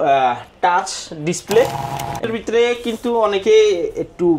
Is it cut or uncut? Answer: cut